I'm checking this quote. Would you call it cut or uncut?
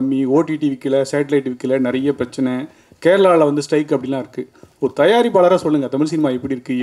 uncut